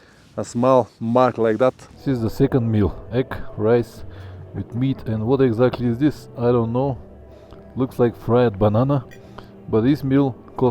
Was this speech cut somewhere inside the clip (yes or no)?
yes